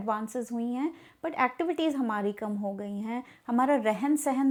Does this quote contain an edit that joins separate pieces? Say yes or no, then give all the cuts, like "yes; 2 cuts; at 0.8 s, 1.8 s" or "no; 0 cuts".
no; 0 cuts